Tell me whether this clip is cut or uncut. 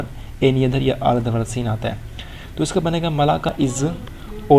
cut